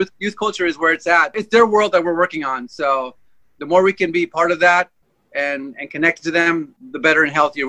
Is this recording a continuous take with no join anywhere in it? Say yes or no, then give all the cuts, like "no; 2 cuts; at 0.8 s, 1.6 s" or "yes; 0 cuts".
no; 2 cuts; at 1.3 s, 6.8 s